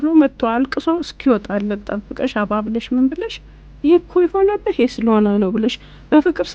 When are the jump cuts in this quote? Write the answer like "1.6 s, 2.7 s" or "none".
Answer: none